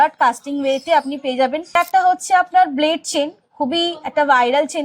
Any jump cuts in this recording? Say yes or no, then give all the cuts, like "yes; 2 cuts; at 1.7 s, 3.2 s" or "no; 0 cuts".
yes; 1 cut; at 1.8 s